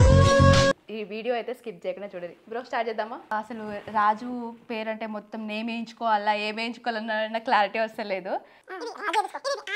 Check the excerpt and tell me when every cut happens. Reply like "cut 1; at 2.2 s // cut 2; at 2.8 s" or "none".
cut 1; at 0.9 s // cut 2; at 3.3 s // cut 3; at 8.6 s